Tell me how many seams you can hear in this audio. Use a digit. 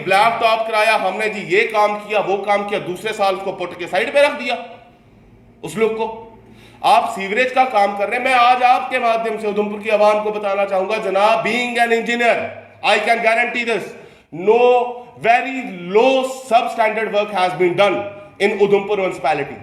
0